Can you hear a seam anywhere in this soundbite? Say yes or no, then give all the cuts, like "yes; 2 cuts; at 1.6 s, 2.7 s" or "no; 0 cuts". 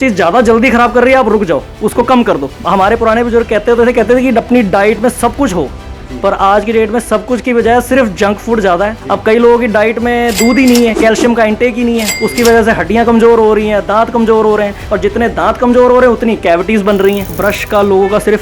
yes; 3 cuts; at 2.5 s, 9.0 s, 17.4 s